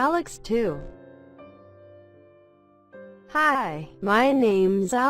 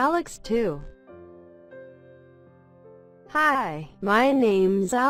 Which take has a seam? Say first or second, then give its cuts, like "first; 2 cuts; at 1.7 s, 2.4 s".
first; 2 cuts; at 0.8 s, 3.3 s